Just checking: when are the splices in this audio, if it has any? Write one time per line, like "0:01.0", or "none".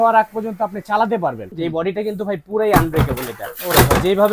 0:01.5